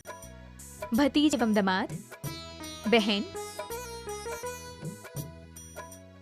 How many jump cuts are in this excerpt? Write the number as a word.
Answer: one